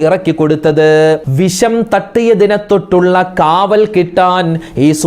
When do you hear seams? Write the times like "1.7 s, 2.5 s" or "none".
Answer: 1.3 s